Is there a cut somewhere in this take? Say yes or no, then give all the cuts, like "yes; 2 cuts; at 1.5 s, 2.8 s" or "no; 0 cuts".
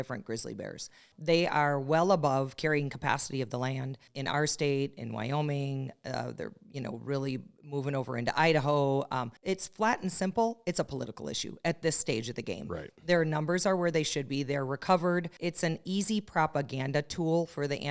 yes; 4 cuts; at 1.0 s, 4.1 s, 9.3 s, 15.3 s